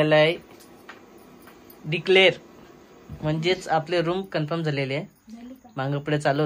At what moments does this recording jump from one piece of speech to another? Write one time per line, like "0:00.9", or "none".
none